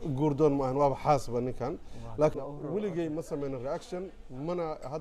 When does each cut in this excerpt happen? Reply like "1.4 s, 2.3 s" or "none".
2.3 s